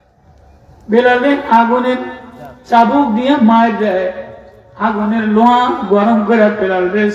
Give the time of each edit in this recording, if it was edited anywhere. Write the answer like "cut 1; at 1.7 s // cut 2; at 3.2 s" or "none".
none